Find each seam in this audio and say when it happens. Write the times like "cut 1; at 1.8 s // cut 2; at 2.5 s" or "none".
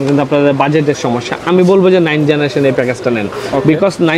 none